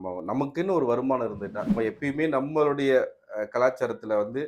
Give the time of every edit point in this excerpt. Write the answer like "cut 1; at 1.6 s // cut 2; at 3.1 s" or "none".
cut 1; at 1.8 s